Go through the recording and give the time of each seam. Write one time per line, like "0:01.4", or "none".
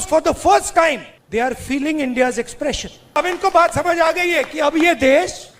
0:01.1
0:03.1